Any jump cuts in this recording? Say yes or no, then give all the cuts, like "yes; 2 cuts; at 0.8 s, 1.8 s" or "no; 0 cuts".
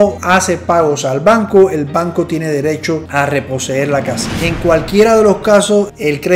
yes; 2 cuts; at 3.1 s, 4.3 s